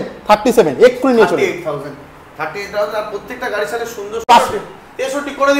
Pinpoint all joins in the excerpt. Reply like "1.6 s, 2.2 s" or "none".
4.3 s